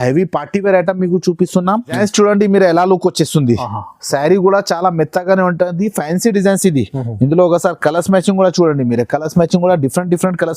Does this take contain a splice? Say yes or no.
yes